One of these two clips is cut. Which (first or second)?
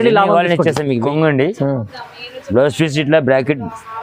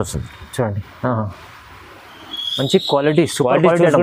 first